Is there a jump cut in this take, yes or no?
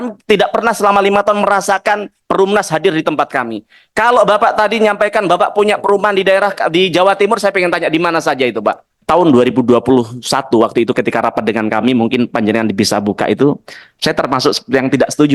yes